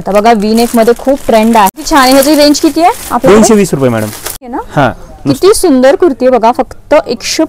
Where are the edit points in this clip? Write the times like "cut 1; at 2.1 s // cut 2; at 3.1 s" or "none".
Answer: cut 1; at 1.8 s // cut 2; at 4.4 s